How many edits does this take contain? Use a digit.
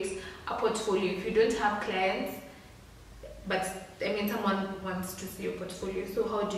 0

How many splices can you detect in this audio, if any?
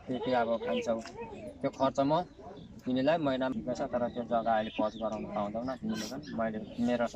1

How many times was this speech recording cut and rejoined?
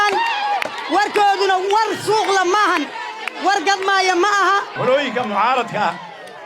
1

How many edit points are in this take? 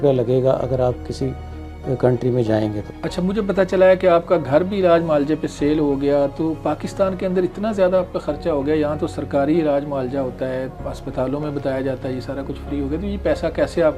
0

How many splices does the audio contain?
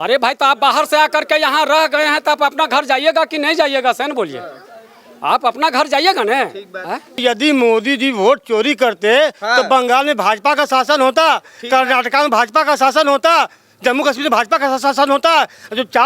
1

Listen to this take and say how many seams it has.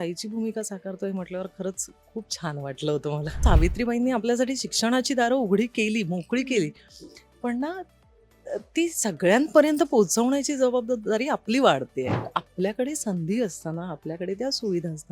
2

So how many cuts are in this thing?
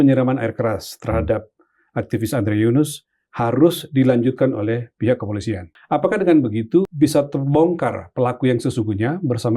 2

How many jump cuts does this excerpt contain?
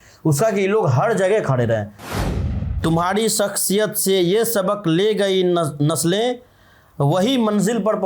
1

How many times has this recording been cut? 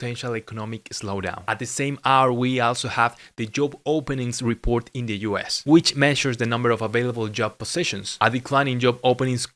0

